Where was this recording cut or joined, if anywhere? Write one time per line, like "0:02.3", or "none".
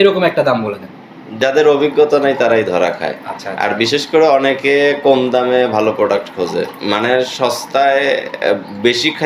0:01.2